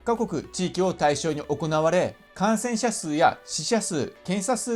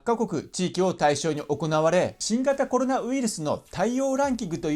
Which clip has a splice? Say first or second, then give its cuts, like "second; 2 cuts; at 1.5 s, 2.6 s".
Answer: second; 1 cut; at 2.2 s